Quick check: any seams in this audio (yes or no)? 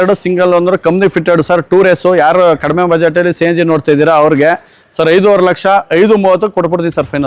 no